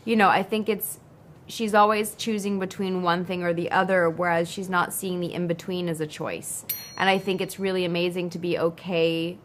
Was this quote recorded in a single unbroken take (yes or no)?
yes